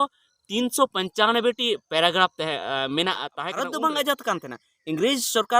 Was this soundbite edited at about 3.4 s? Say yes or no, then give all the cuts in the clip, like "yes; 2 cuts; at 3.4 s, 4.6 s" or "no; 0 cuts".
yes; 1 cut; at 3.4 s